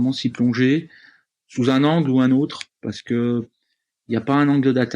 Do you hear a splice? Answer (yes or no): no